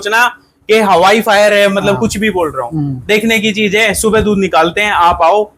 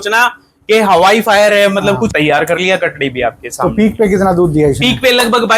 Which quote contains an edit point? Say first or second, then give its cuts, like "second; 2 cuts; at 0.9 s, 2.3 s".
second; 1 cut; at 2.1 s